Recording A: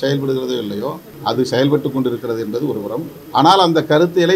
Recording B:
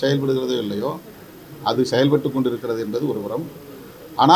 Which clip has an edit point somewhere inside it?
A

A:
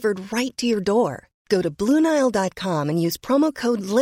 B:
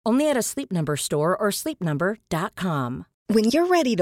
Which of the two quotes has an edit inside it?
B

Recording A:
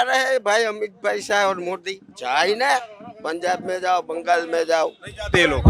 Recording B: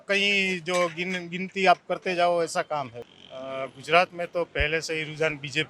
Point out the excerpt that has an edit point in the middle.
B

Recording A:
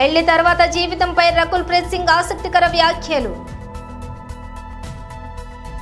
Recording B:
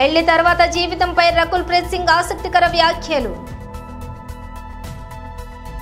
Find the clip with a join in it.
A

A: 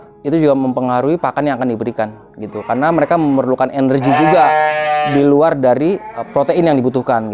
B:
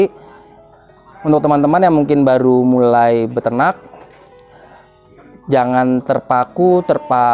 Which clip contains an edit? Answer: A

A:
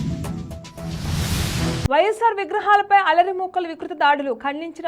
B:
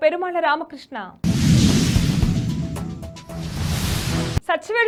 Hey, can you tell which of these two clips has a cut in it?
A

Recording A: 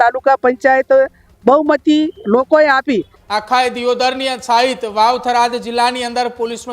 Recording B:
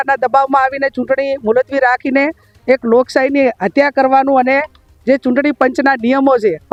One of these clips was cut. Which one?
A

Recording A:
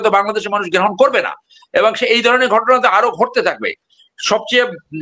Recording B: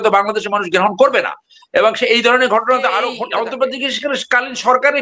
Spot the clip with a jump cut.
B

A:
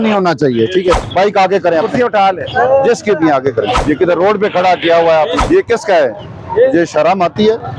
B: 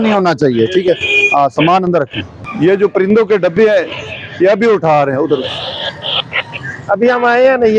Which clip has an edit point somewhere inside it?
A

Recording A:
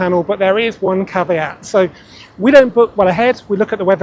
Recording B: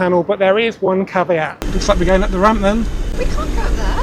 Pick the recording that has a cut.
B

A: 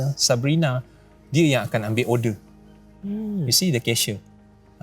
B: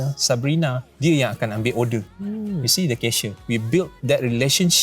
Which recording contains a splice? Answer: B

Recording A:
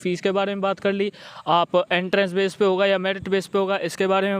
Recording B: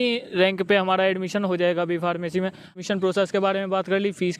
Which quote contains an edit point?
B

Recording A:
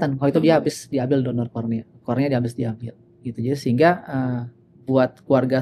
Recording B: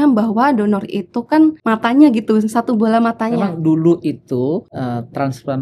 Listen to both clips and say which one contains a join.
B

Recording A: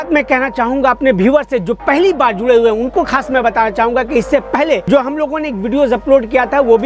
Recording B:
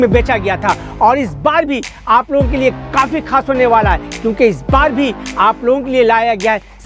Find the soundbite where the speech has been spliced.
A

